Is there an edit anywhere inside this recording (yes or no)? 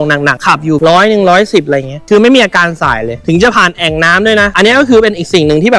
yes